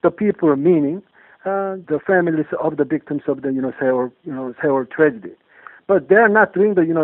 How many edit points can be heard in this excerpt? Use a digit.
1